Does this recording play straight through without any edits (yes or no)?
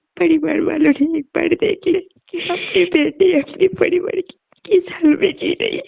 no